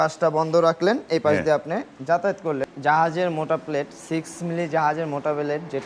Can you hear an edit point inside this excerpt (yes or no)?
yes